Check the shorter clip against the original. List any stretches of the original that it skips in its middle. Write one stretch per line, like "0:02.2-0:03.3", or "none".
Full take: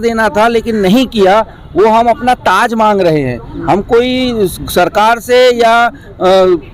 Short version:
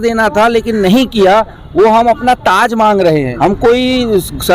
0:03.3-0:03.6